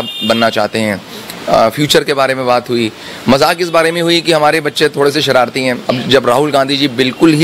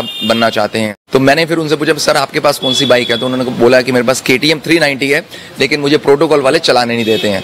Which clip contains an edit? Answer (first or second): second